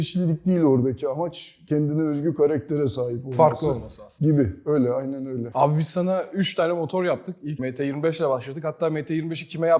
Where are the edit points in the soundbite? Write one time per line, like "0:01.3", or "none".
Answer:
none